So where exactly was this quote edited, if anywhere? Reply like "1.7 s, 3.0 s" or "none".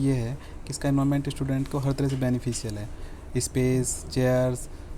none